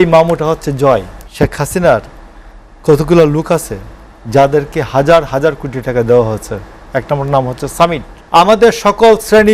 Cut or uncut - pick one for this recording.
cut